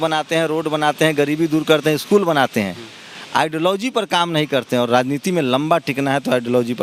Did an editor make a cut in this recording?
no; 0 cuts

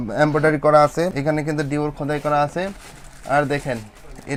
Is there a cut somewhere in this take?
no; 0 cuts

